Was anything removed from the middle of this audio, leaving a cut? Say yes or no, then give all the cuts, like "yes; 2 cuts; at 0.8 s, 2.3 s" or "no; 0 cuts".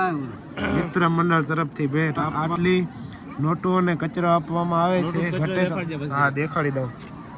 no; 0 cuts